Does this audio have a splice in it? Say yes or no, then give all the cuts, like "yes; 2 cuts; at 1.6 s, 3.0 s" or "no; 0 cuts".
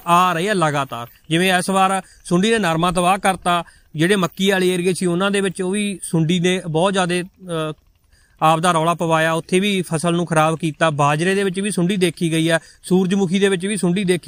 no; 0 cuts